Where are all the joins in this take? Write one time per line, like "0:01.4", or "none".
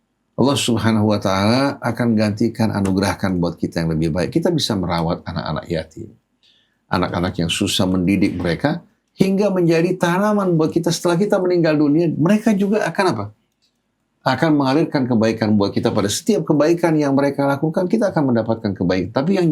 none

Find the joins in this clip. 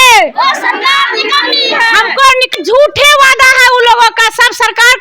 0:02.5

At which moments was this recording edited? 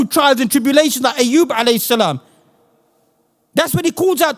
none

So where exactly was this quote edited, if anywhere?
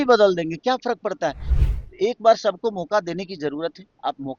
0:01.4

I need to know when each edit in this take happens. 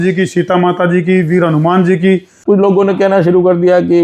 0:02.4

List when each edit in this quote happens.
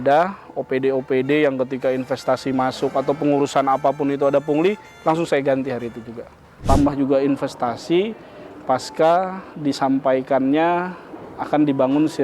0:06.6

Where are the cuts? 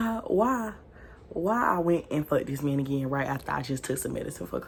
none

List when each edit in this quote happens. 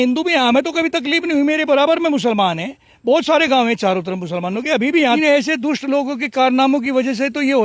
0:05.2

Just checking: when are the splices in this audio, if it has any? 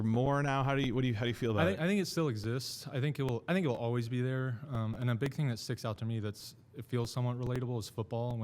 none

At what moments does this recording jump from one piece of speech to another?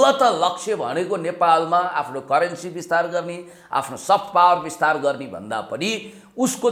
none

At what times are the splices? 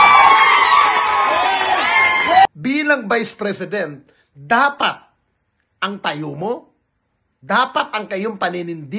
0:02.4

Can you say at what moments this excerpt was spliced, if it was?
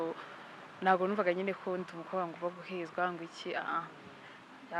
none

